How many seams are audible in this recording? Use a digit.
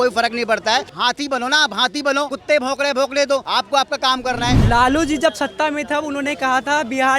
4